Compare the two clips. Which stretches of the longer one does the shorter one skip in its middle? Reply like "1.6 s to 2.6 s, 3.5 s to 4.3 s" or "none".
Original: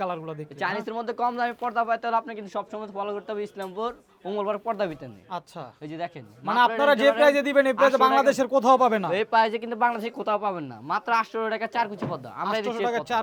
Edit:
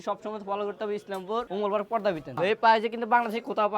4.0 s to 4.2 s, 5.1 s to 9.1 s